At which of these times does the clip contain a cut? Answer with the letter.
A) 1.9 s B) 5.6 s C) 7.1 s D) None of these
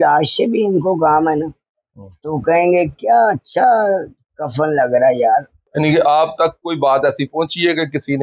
B